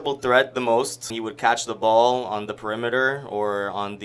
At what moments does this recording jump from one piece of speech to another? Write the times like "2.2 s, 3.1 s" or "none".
1.1 s